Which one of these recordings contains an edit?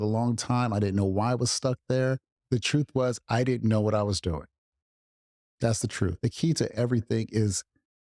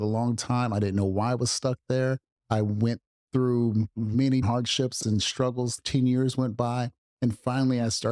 first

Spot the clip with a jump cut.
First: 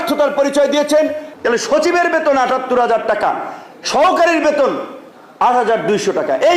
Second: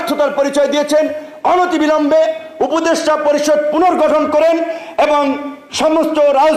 first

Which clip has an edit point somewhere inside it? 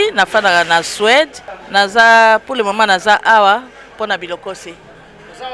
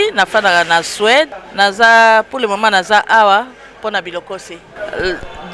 second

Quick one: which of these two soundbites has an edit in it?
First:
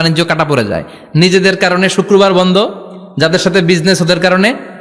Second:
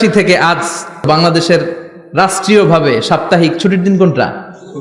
second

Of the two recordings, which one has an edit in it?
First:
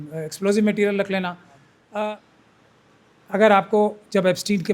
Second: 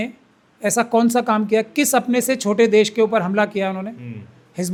first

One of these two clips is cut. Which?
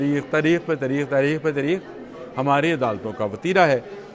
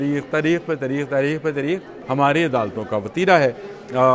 second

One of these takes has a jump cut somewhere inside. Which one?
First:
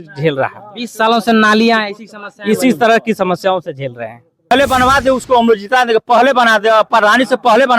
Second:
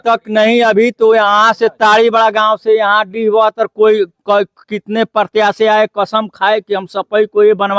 first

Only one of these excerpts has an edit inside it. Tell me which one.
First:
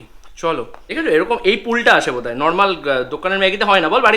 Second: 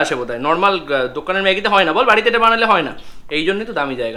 first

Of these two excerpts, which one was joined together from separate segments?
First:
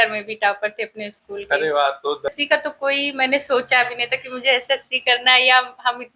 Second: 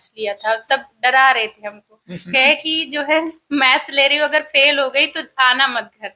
first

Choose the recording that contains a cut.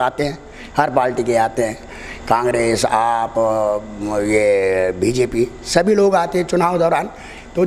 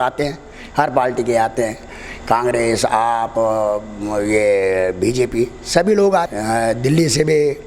second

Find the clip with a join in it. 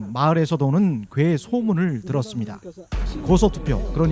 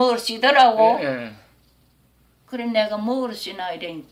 first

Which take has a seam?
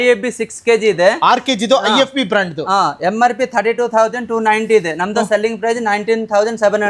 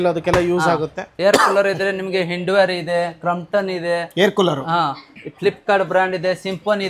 second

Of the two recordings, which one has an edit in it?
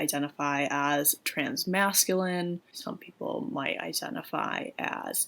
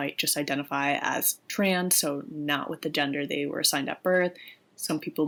first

